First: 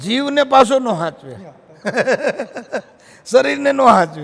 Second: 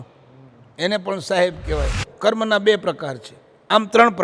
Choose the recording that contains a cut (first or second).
second